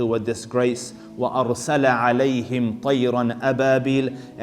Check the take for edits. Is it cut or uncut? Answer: uncut